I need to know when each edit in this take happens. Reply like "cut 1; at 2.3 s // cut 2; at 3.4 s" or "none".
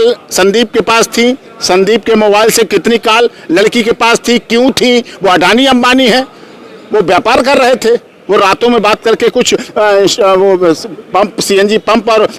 none